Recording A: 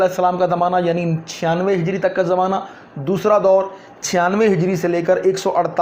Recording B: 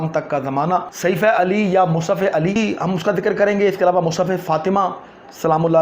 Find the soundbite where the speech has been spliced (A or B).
B